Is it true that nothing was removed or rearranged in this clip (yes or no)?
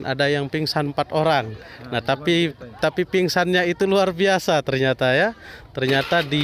yes